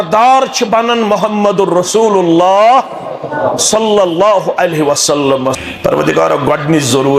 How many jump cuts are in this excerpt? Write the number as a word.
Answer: one